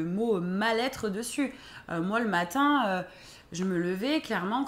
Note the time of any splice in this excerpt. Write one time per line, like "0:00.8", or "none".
none